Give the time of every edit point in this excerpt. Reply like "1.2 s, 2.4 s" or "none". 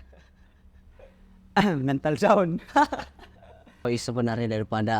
3.8 s